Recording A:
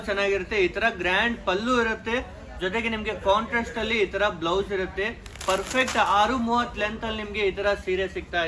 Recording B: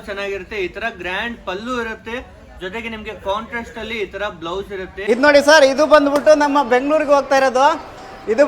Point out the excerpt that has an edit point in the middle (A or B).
B